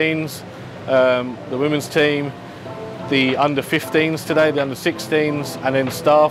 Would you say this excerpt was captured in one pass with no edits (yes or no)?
yes